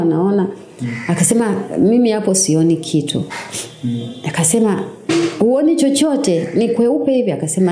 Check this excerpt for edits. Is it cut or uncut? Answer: uncut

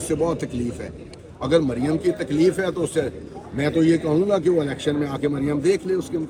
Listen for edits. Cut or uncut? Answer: uncut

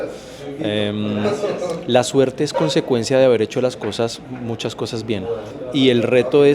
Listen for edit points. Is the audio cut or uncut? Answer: cut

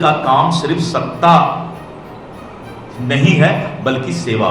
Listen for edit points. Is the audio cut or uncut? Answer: uncut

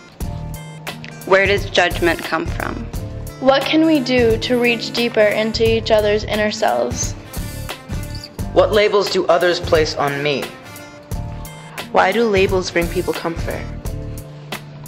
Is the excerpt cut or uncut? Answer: cut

